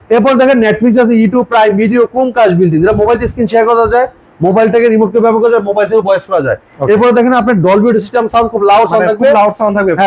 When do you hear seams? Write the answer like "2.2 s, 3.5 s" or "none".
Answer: none